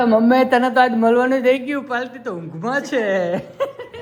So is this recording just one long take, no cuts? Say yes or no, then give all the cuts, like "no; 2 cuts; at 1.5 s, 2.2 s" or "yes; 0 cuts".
yes; 0 cuts